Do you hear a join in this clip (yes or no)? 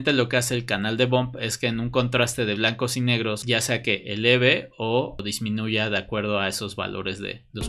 yes